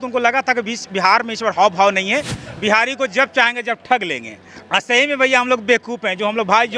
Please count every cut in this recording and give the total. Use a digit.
1